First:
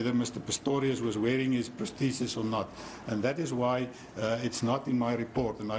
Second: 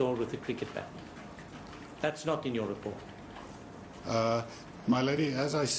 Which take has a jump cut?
second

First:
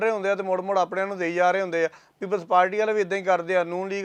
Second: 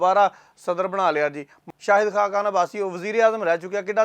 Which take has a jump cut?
second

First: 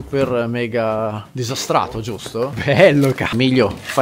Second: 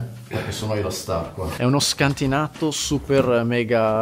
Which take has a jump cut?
second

